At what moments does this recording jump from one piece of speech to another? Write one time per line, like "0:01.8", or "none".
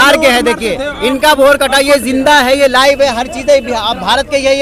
none